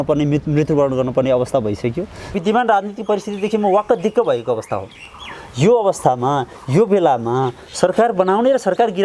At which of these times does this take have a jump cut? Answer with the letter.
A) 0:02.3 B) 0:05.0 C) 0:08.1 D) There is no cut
A